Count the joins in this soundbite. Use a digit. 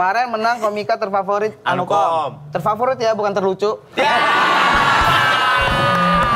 0